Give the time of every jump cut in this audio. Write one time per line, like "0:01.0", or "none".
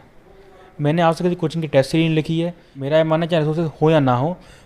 0:02.7